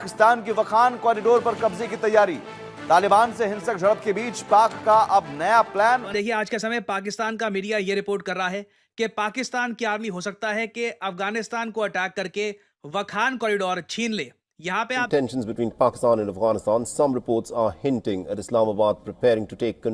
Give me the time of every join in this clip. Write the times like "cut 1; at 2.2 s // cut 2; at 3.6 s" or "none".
cut 1; at 6.2 s // cut 2; at 15.0 s